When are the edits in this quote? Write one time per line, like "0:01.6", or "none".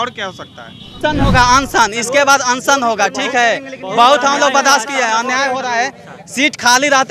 0:01.0